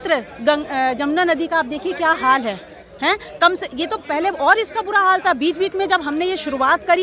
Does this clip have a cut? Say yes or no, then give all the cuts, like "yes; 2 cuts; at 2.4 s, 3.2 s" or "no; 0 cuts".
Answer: no; 0 cuts